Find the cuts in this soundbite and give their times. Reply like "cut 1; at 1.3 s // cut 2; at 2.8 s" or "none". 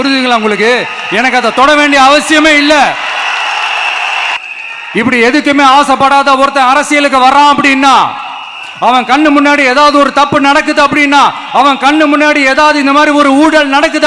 cut 1; at 4.1 s